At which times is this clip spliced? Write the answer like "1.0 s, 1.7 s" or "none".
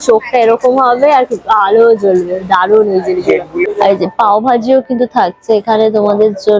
3.7 s